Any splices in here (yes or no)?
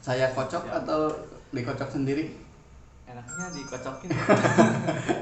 no